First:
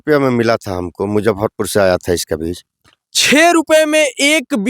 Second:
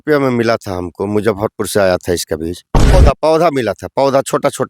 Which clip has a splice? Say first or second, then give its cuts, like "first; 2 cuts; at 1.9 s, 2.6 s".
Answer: second; 1 cut; at 2.9 s